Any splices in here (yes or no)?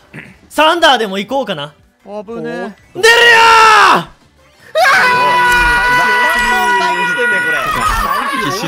no